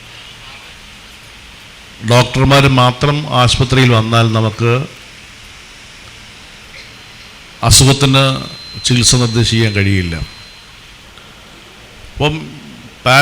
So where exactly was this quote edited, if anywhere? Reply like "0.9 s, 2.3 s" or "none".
11.0 s